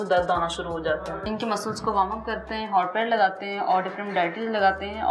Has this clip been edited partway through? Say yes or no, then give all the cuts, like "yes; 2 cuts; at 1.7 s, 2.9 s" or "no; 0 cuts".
yes; 1 cut; at 1.2 s